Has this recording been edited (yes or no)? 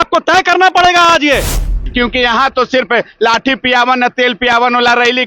yes